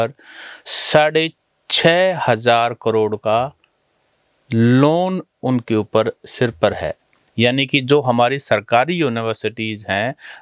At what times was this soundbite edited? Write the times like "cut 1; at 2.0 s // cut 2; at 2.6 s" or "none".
none